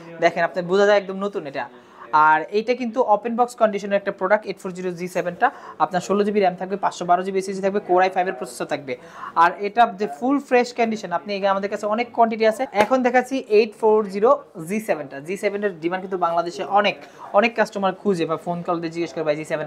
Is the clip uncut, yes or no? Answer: yes